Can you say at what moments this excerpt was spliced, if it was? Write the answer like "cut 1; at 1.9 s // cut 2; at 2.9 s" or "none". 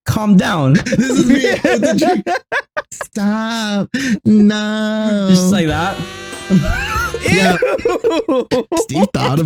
none